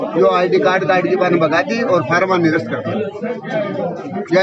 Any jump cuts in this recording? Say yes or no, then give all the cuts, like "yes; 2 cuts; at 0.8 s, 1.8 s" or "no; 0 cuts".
no; 0 cuts